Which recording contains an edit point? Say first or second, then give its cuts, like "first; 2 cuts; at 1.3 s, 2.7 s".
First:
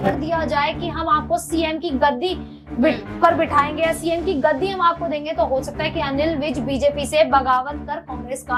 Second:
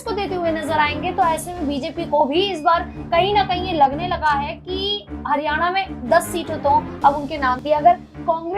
second; 1 cut; at 7.6 s